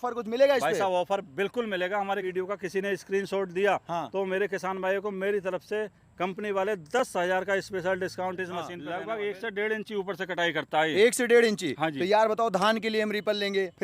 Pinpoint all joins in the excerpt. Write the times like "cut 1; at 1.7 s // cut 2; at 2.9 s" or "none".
cut 1; at 2.3 s // cut 2; at 8.8 s